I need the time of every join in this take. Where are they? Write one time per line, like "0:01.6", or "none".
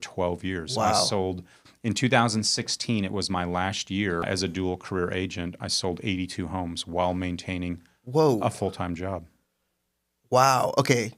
0:04.3